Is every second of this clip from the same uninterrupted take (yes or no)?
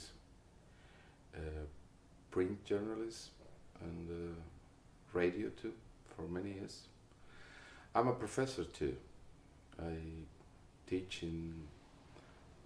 no